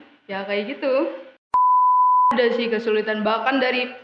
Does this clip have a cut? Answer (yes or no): yes